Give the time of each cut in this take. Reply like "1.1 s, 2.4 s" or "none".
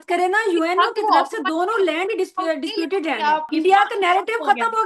3.5 s